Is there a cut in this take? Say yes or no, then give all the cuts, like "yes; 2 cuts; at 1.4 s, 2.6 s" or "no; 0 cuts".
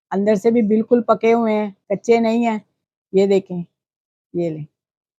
no; 0 cuts